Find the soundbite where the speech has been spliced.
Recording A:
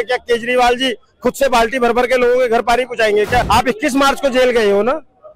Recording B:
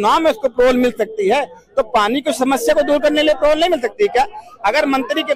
A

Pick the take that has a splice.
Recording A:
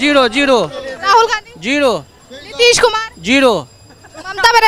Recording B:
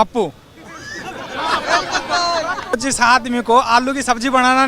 B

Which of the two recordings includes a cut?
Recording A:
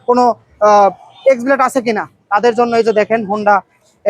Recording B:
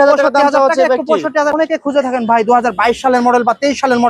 B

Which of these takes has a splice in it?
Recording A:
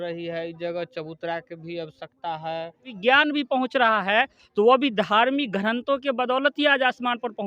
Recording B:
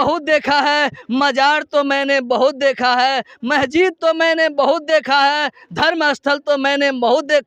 A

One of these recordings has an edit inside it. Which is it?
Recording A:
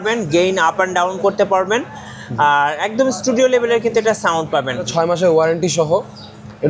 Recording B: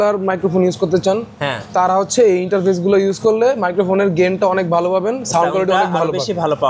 A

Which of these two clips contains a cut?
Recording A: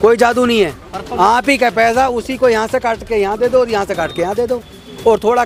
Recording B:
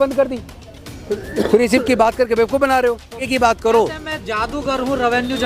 B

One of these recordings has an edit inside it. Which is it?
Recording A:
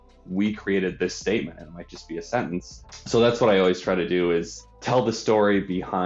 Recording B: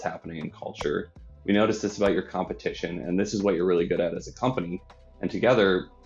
A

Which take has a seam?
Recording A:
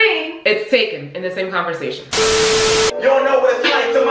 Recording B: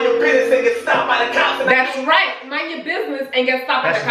A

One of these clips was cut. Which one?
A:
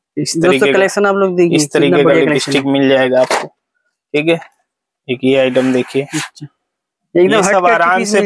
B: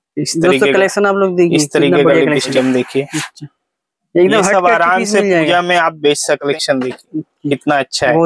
B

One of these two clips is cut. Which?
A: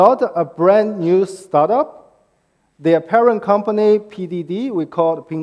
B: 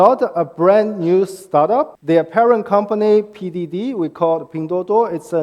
B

